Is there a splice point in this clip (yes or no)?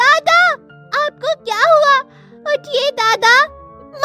no